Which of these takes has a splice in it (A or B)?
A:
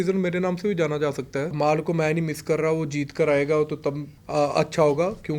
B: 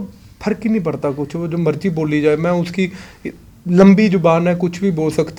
A